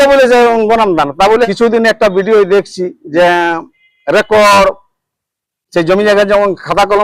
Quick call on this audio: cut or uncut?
cut